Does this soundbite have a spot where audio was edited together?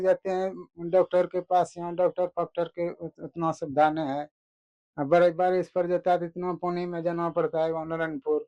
no; 0 cuts

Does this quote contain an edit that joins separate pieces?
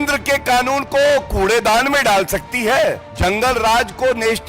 yes; 1 cut; at 3.1 s

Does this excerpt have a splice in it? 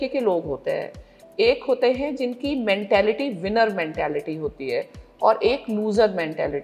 no; 0 cuts

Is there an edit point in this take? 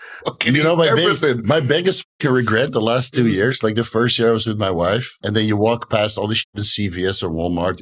yes; 1 cut; at 5.1 s

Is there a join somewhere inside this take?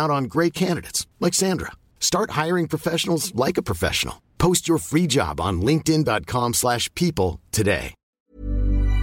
yes; 1 cut; at 8.0 s

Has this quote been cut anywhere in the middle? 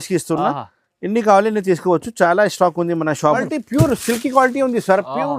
yes; 1 cut; at 3.4 s

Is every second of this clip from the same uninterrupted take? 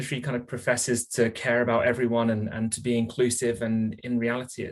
yes; 0 cuts

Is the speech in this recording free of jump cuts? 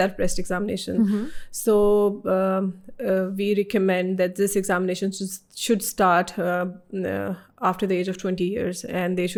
yes; 0 cuts

